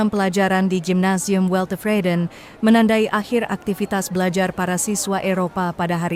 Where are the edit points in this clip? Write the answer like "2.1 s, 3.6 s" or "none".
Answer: none